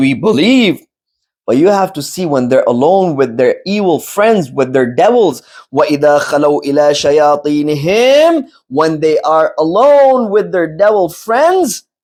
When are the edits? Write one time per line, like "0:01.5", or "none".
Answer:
none